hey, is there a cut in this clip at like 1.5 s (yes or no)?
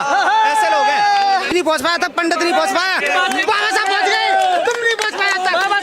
yes